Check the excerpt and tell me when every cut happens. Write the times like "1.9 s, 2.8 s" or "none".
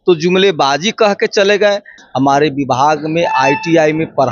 2.0 s